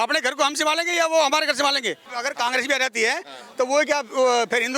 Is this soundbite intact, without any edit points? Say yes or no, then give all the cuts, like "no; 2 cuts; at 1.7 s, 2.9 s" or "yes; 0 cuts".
no; 1 cut; at 2.1 s